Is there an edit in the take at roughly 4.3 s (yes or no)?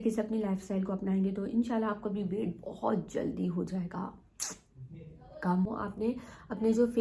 no